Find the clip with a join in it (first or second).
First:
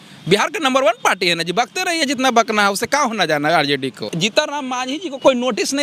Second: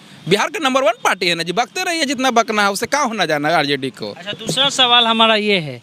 first